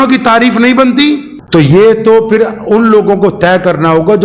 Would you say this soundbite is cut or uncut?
uncut